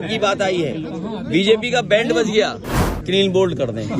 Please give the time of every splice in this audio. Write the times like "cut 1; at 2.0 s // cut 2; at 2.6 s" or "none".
cut 1; at 3.0 s

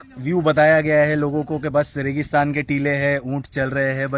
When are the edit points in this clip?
none

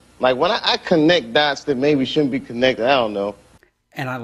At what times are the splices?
cut 1; at 3.2 s

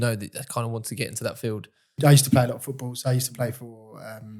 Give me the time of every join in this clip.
cut 1; at 2.0 s

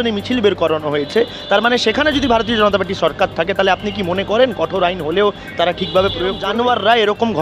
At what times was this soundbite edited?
cut 1; at 6.4 s

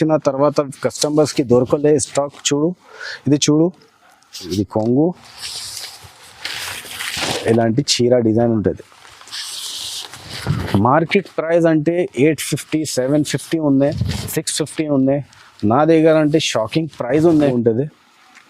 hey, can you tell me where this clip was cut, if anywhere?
cut 1; at 4.5 s // cut 2; at 17.5 s

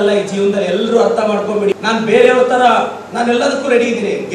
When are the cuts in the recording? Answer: cut 1; at 1.8 s

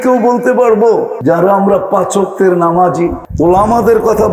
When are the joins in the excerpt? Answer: cut 1; at 1.1 s // cut 2; at 3.2 s

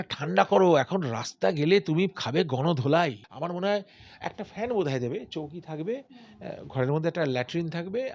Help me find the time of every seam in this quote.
cut 1; at 3.3 s

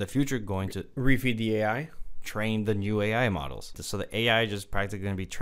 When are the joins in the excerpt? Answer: cut 1; at 3.8 s

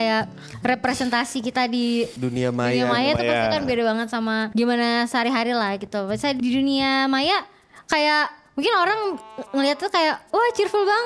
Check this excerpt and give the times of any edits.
cut 1; at 2.1 s // cut 2; at 4.5 s // cut 3; at 6.4 s

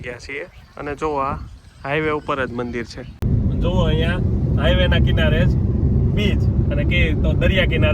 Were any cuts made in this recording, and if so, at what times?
cut 1; at 3.2 s

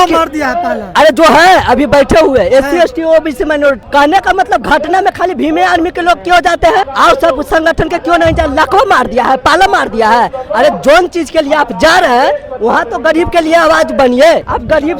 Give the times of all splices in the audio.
none

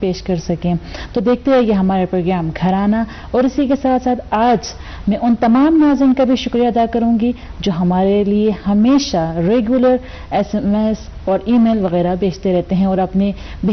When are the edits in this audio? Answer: cut 1; at 5.0 s

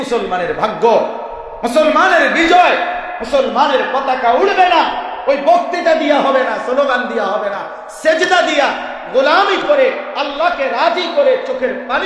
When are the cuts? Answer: none

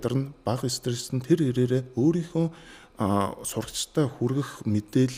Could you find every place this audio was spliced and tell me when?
none

